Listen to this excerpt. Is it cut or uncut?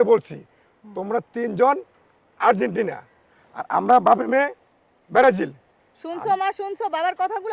uncut